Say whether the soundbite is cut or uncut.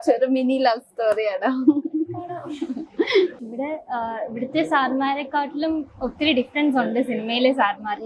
cut